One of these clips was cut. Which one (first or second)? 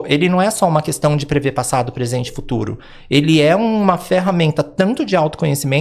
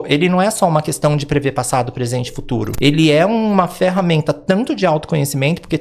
second